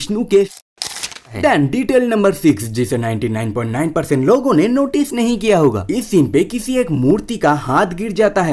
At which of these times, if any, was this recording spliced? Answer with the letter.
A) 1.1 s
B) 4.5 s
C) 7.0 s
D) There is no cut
A